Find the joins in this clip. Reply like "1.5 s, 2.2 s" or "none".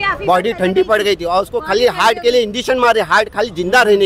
none